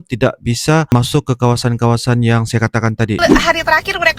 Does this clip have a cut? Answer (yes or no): yes